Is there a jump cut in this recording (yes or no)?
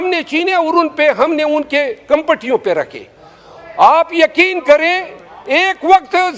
no